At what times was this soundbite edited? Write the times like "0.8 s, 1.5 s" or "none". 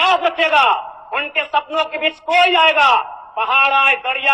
none